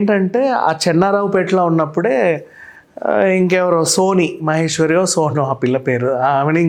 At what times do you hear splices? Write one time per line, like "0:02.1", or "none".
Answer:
none